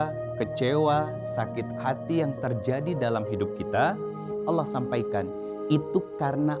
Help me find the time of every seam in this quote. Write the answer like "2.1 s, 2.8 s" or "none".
none